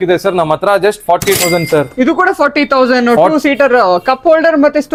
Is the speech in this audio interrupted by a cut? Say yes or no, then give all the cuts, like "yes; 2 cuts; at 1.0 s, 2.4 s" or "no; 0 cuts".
no; 0 cuts